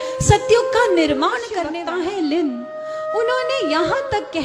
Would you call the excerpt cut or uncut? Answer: cut